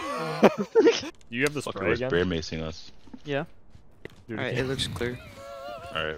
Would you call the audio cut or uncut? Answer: cut